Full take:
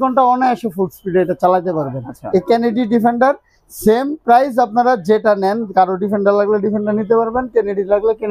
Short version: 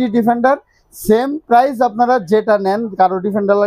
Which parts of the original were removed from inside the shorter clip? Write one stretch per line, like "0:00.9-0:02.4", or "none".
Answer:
none